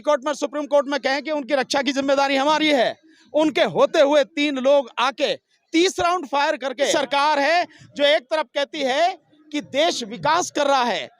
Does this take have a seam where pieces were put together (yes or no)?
yes